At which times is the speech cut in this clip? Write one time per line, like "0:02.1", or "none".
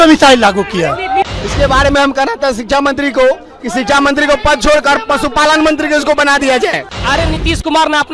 0:01.2
0:06.9